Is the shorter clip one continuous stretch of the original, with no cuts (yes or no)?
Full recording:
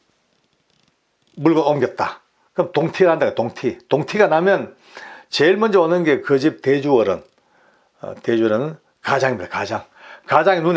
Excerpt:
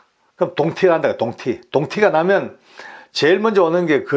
yes